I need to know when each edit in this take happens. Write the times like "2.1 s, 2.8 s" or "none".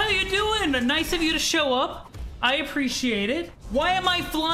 3.6 s